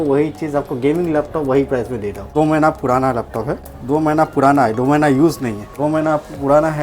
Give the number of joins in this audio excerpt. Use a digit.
3